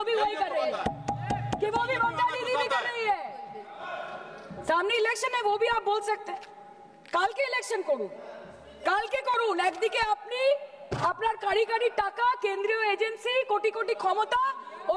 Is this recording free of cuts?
yes; 0 cuts

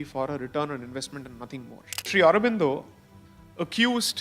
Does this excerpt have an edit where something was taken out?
yes; 1 cut; at 2.1 s

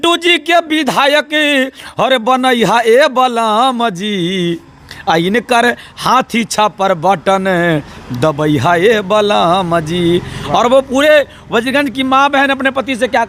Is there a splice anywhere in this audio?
no; 0 cuts

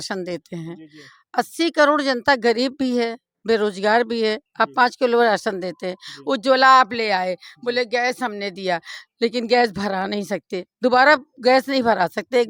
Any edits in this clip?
no; 0 cuts

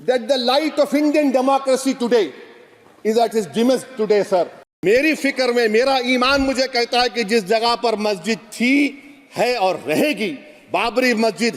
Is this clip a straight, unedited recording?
no; 1 cut; at 4.6 s

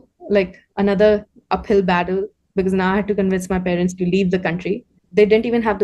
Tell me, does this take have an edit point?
yes; 1 cut; at 4.9 s

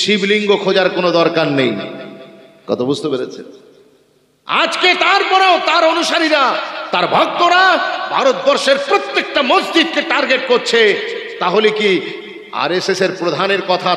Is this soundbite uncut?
yes; 0 cuts

